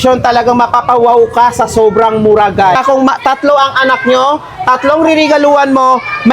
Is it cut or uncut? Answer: cut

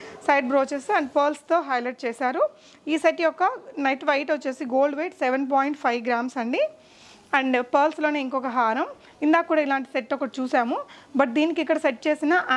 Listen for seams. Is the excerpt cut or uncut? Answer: uncut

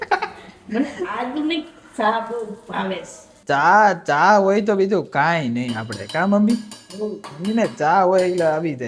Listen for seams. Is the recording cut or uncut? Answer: uncut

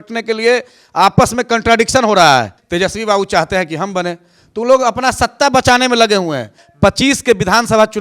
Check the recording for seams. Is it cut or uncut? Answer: cut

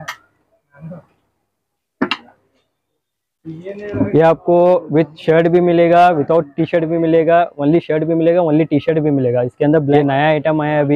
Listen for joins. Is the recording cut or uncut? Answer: cut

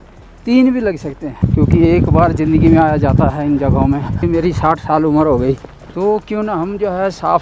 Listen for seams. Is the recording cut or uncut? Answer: cut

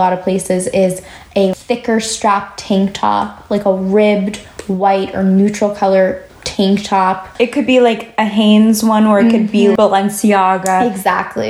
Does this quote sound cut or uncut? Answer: cut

